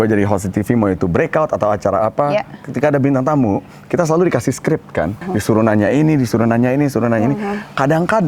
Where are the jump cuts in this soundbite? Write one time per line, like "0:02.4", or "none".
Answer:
0:05.2